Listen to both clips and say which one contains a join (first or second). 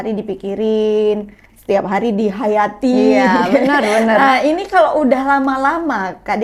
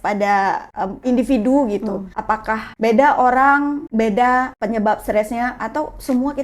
second